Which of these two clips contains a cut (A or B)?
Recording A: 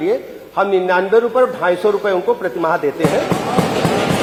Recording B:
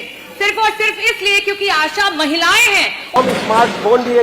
B